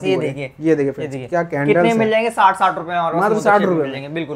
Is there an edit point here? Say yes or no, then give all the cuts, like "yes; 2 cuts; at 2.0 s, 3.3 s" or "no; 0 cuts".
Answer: no; 0 cuts